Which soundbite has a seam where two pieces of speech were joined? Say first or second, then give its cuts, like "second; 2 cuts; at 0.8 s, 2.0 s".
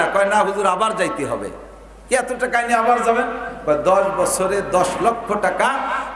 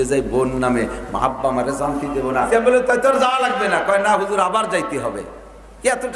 second; 1 cut; at 2.5 s